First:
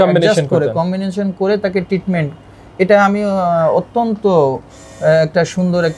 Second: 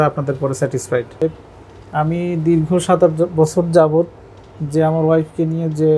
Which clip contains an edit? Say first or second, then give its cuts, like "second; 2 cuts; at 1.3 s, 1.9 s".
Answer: second; 1 cut; at 1.2 s